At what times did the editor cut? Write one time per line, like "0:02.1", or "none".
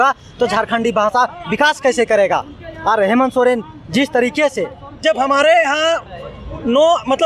0:05.0

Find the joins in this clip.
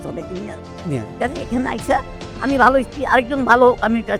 none

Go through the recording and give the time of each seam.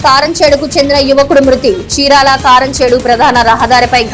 none

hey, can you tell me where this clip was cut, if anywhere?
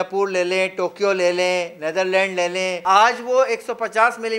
0:02.8

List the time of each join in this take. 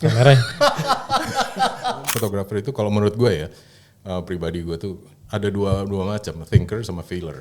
0:02.0

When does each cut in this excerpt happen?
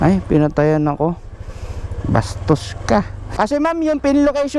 0:03.2

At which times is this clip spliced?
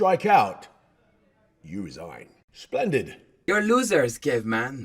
0:03.2

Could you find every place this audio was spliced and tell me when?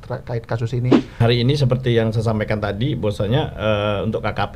0:01.2

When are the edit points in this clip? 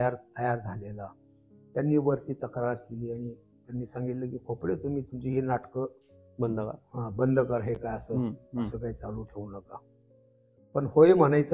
none

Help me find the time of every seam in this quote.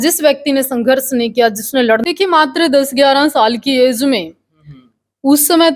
0:02.0

